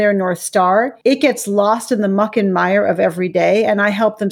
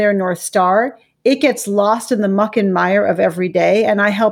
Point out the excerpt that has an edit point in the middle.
first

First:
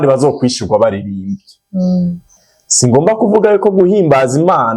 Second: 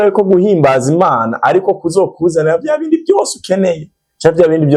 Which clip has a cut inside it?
first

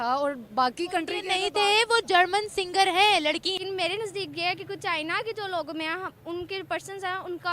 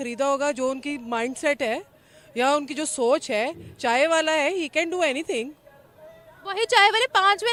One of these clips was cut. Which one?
first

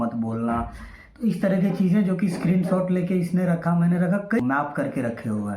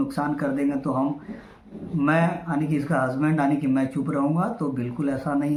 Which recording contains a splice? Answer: first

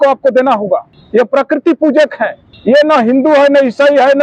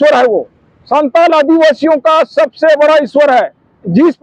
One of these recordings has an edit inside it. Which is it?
first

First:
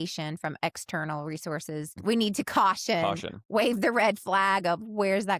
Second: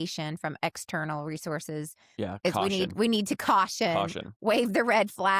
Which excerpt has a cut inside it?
first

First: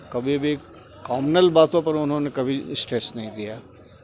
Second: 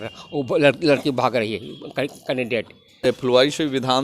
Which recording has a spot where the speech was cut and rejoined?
second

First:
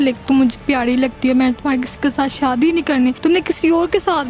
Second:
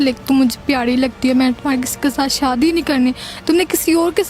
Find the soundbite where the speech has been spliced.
first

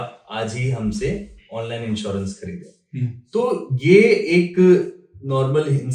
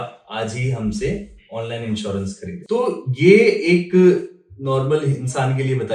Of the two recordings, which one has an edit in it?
second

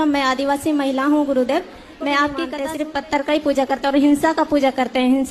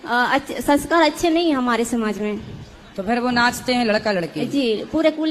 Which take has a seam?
first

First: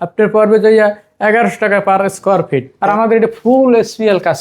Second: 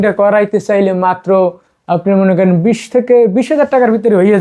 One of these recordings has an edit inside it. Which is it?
first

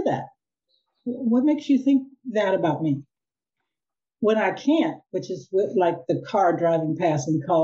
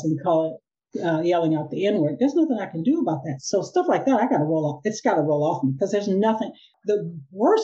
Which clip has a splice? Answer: second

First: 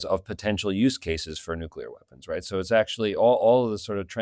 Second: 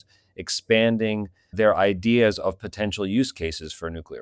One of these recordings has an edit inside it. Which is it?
second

